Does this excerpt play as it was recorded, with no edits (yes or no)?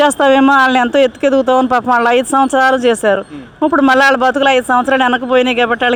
yes